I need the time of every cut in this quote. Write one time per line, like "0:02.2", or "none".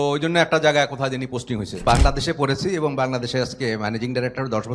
0:01.8